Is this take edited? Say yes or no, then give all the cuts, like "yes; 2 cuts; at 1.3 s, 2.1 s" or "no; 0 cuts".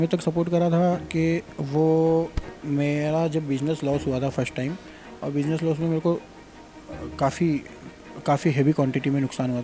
no; 0 cuts